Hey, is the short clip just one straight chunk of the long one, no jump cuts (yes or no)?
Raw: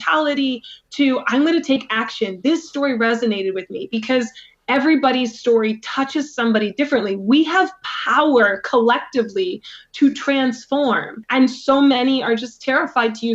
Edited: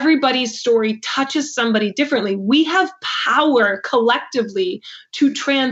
yes